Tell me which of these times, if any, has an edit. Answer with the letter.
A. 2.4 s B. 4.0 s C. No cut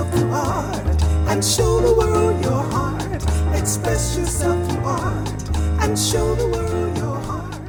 C